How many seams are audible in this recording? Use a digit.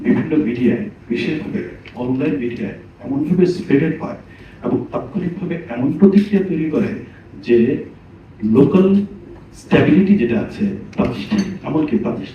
0